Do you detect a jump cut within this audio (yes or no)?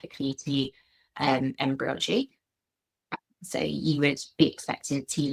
no